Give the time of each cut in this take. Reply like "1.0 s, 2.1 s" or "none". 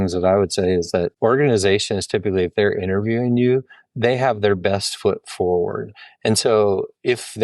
1.1 s